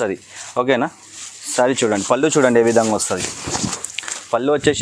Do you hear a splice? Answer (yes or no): no